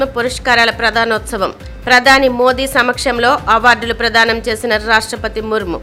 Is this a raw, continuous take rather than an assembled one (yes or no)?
yes